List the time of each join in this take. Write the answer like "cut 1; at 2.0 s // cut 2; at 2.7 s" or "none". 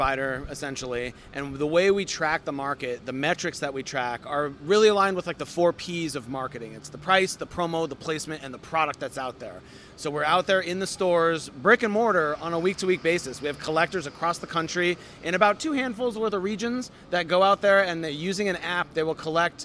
none